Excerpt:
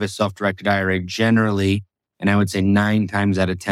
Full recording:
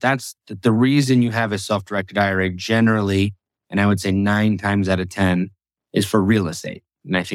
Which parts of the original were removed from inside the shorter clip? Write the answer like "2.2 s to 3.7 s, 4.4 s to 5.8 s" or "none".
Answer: none